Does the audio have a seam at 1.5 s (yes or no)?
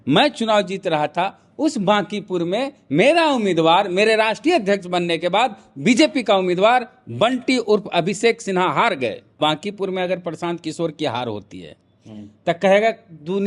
no